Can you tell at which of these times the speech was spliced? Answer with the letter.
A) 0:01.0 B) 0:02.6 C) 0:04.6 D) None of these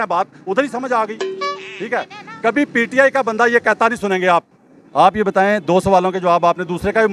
C